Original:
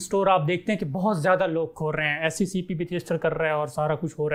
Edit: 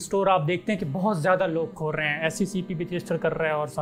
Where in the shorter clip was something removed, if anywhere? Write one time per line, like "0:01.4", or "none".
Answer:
none

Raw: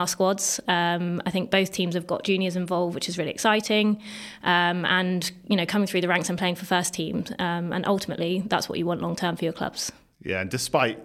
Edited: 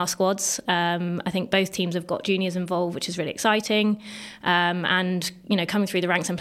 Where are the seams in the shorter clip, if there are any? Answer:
none

